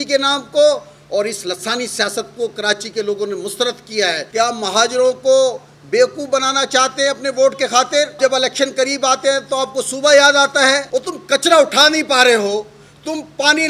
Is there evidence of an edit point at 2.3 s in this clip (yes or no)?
no